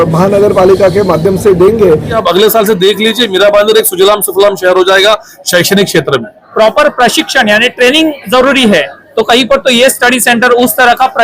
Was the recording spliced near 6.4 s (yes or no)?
yes